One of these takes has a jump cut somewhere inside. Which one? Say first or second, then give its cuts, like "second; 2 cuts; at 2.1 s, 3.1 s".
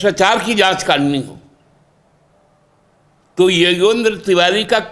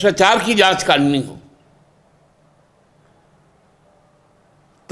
first; 1 cut; at 2.3 s